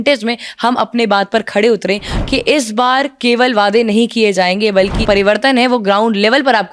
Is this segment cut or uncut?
cut